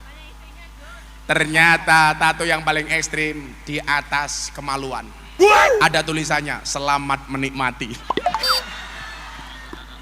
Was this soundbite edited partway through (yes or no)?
no